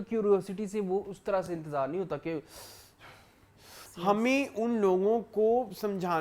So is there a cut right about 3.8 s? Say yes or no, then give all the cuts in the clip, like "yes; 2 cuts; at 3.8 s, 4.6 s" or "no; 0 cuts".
yes; 1 cut; at 3.8 s